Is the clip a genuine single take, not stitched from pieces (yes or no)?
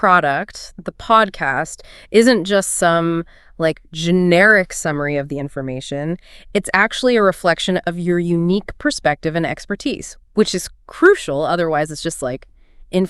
yes